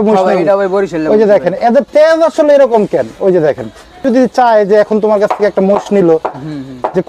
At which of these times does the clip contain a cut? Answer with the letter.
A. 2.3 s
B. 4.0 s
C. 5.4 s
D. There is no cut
B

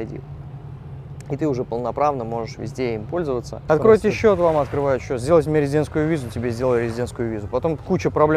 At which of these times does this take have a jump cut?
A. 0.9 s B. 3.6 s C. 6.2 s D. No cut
B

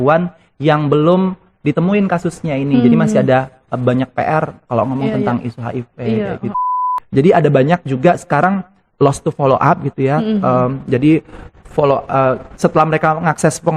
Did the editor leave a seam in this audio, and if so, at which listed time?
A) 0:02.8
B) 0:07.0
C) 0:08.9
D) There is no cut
B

